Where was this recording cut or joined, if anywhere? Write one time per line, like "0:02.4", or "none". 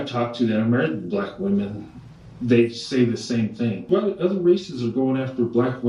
0:03.9